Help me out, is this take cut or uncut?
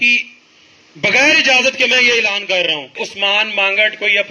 cut